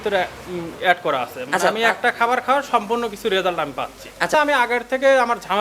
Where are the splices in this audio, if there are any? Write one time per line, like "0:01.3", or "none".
0:04.3